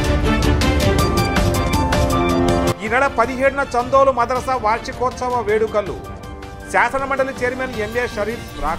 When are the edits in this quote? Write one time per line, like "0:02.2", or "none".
0:02.7